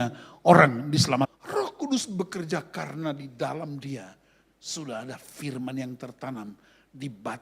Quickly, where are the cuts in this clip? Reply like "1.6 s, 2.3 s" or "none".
1.3 s